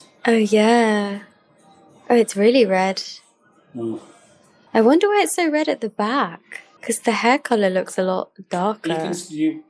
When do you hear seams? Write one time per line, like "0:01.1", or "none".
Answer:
none